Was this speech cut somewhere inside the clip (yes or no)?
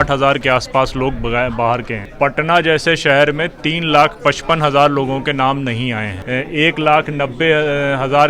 yes